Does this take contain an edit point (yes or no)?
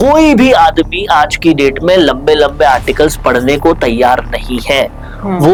no